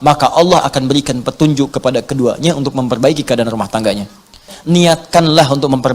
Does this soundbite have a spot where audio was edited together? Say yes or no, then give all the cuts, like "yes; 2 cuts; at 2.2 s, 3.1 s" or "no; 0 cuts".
yes; 1 cut; at 4.5 s